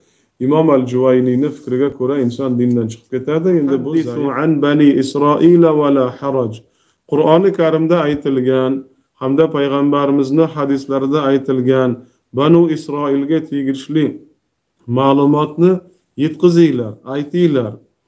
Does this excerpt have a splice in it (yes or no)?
yes